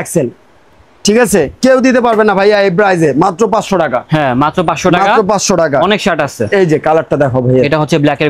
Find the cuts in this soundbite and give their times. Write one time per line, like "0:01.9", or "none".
none